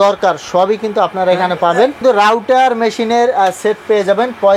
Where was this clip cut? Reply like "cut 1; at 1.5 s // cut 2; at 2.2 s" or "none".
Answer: cut 1; at 2.0 s